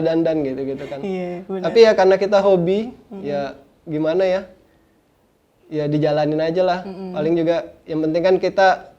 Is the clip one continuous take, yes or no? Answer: yes